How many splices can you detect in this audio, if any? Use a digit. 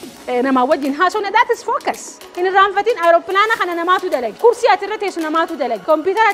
1